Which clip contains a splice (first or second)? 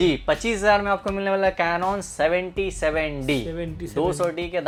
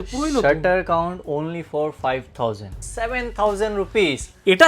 second